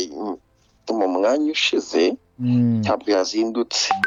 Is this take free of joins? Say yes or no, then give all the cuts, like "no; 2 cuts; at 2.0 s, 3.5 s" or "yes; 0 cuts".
yes; 0 cuts